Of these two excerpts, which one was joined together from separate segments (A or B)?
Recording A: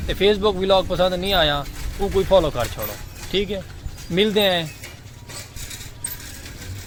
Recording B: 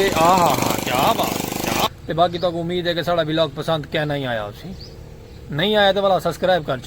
B